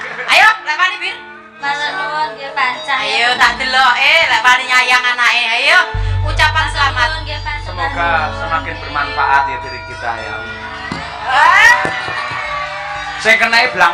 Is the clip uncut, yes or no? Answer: no